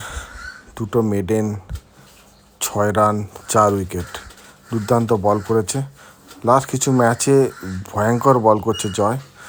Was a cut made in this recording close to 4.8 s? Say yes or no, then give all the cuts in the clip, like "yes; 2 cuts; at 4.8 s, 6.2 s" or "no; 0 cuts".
no; 0 cuts